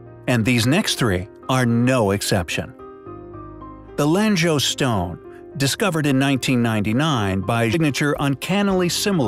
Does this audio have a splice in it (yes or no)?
no